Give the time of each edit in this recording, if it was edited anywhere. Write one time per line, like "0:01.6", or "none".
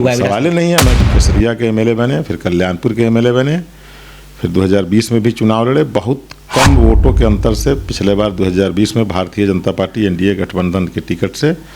0:01.0